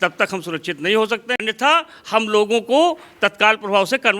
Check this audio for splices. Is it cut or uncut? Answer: cut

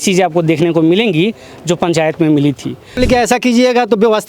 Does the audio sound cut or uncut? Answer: cut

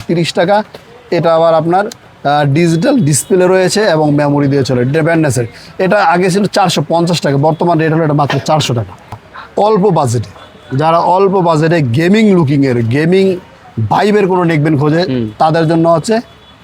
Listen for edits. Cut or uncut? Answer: cut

